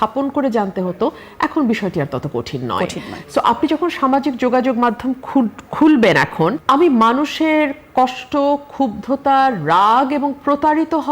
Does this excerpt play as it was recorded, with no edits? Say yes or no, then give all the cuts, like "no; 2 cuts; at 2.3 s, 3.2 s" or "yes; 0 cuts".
no; 1 cut; at 6.6 s